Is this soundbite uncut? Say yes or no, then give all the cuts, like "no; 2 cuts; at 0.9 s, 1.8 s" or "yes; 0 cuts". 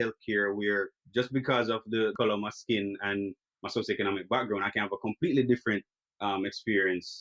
no; 1 cut; at 1.0 s